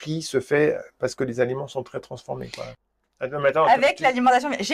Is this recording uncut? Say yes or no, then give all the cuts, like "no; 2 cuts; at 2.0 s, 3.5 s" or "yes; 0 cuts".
no; 1 cut; at 2.6 s